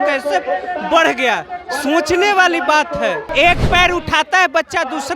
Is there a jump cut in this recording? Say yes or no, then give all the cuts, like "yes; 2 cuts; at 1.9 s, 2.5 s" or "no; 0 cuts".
yes; 1 cut; at 3.3 s